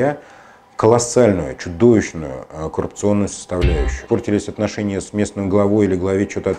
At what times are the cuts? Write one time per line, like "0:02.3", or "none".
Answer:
0:04.0